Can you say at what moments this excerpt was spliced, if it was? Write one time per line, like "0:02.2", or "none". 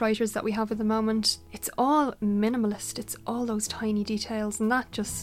0:01.4

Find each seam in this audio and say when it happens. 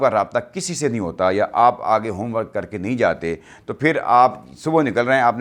none

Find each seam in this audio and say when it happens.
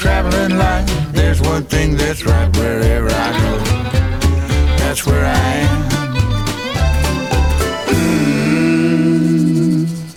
none

